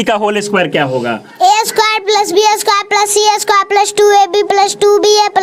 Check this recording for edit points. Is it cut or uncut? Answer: uncut